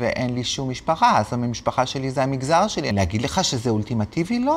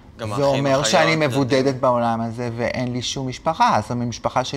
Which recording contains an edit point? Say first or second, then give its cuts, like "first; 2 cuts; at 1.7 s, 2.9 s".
first; 1 cut; at 2.9 s